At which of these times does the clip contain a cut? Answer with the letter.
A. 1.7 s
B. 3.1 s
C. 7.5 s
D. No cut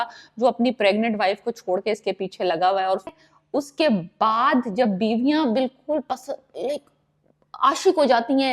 B